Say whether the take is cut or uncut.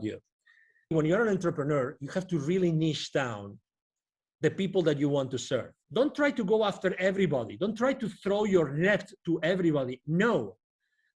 cut